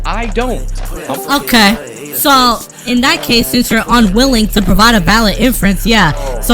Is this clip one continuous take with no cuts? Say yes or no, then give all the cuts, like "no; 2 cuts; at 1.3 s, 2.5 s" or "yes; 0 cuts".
no; 1 cut; at 0.9 s